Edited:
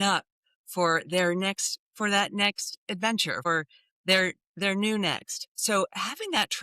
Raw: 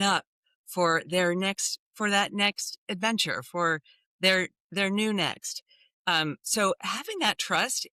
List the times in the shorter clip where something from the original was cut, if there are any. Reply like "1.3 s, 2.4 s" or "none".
3.5 s, 5.5 s